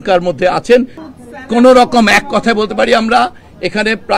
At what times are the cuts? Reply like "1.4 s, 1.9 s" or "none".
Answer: 1.0 s